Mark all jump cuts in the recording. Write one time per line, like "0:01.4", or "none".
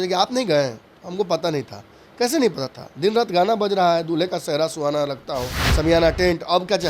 0:05.6